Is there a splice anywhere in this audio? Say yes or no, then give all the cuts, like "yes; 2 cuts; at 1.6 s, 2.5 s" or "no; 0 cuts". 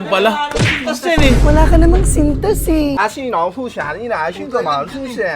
yes; 1 cut; at 3.0 s